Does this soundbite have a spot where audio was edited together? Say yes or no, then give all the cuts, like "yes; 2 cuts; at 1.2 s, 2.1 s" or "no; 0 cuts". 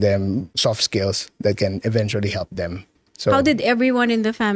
yes; 1 cut; at 3.0 s